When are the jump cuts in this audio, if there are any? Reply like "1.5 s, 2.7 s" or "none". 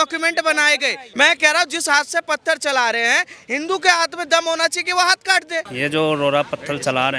1.0 s, 5.7 s